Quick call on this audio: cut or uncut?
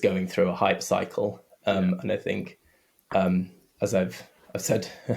uncut